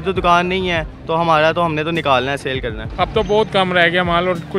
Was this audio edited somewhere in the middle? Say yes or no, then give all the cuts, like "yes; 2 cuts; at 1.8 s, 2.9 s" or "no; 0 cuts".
yes; 1 cut; at 2.8 s